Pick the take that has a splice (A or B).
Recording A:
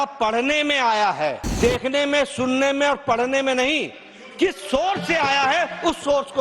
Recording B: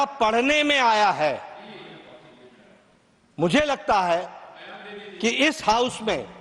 A